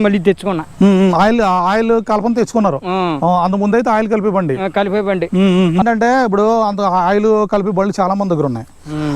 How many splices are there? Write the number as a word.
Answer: one